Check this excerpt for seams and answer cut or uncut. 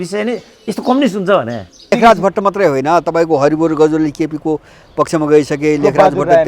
cut